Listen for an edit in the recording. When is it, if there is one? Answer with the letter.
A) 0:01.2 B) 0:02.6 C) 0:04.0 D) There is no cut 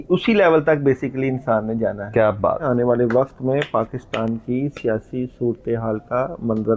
B